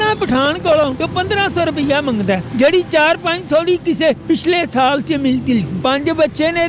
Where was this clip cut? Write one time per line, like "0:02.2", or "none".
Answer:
0:01.0
0:02.5
0:04.2
0:05.7